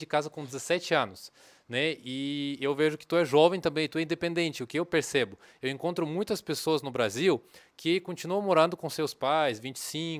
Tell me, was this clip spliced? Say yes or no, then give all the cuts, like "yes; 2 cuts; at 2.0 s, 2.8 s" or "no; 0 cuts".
no; 0 cuts